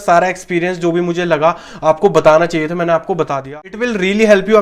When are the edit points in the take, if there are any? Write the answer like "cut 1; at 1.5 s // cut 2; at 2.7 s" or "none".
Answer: cut 1; at 3.6 s